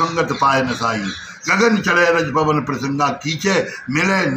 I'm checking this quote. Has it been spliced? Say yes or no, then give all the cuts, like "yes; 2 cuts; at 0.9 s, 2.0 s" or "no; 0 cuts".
no; 0 cuts